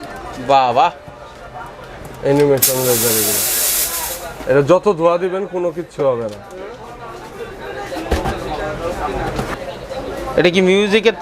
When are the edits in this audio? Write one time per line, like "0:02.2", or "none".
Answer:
0:09.5

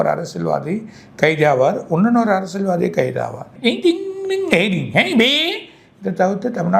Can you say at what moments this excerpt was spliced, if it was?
0:03.5

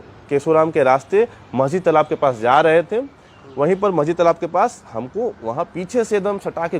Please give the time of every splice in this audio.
none

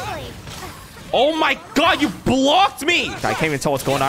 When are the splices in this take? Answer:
0:03.2

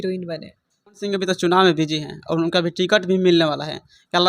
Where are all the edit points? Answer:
0:01.0

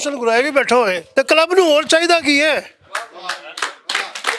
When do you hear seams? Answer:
0:01.0

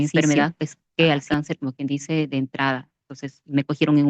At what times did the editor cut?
none

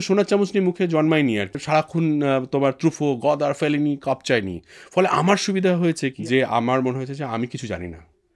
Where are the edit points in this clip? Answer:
0:01.6
0:06.2

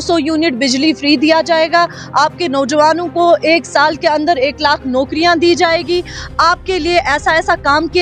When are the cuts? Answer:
none

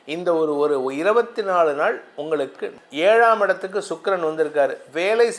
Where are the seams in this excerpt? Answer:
0:02.8

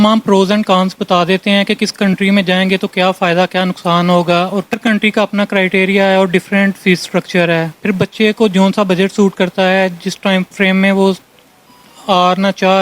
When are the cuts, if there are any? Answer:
0:04.7

